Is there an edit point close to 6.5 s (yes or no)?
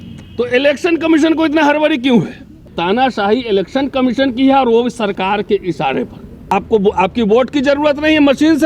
yes